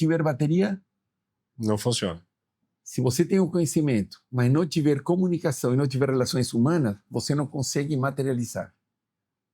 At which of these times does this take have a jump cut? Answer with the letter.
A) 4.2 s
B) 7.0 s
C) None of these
A